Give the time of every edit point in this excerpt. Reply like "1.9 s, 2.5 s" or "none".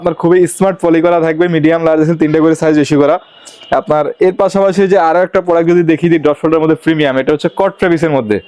none